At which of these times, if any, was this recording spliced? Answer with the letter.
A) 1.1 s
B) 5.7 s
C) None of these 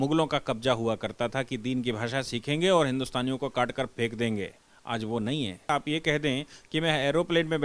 B